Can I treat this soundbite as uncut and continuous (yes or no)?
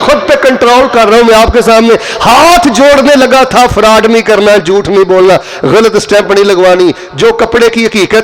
yes